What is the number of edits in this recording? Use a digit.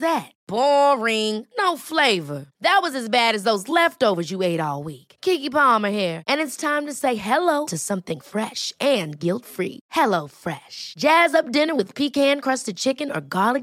0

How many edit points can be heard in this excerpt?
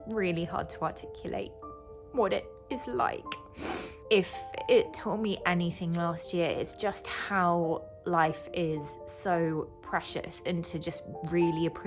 1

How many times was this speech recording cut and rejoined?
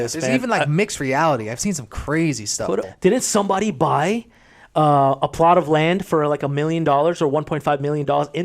1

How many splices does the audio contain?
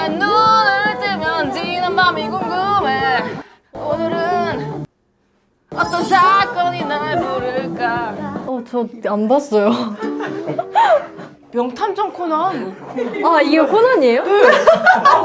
0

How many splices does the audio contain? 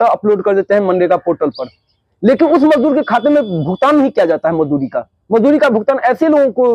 0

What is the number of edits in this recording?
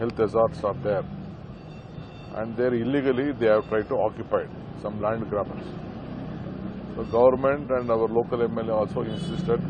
0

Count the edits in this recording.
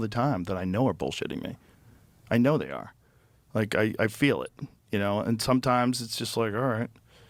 0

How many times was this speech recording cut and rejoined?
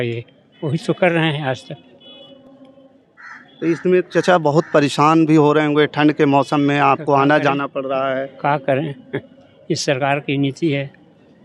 0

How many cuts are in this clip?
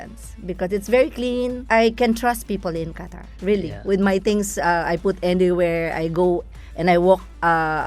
1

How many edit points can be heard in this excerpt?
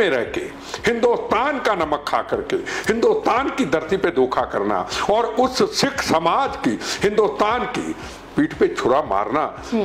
0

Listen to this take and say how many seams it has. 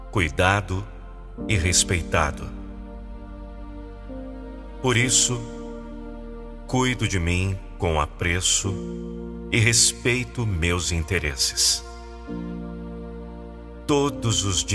2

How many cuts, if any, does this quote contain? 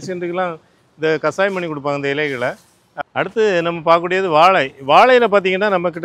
1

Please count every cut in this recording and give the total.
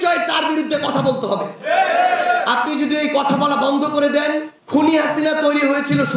1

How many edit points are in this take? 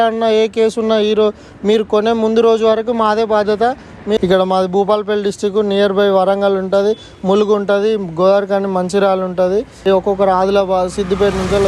2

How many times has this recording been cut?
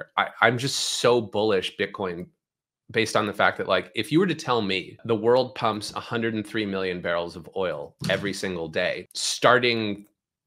2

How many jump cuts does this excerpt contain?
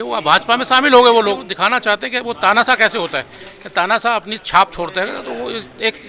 1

